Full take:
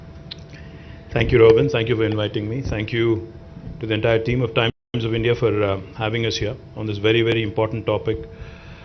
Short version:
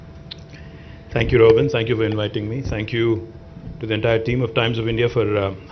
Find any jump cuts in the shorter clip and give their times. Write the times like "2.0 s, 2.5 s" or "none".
4.7 s